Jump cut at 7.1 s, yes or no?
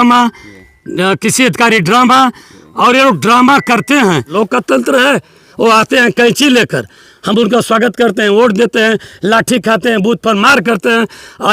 no